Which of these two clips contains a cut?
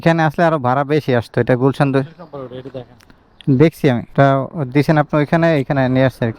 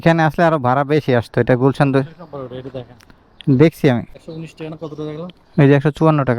second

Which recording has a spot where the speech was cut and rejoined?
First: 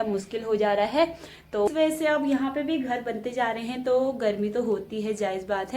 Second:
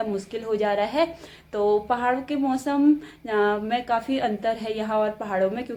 first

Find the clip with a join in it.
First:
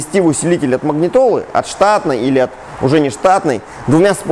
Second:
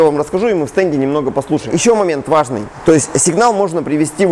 second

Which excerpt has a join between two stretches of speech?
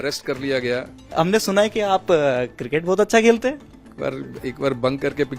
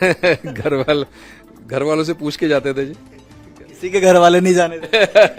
first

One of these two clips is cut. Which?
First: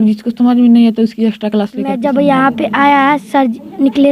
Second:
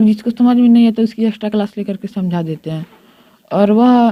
first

